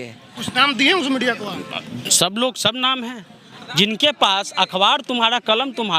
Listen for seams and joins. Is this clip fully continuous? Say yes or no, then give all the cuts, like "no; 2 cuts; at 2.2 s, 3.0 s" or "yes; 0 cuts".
no; 1 cut; at 3.5 s